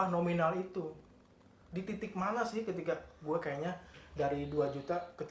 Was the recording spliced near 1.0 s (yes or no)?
no